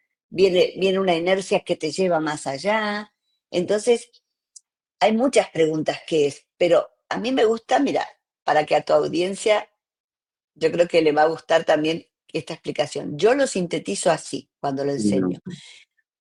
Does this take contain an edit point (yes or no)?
no